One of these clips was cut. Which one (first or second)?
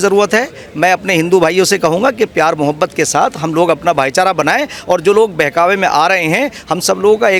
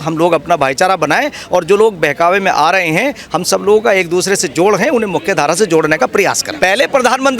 second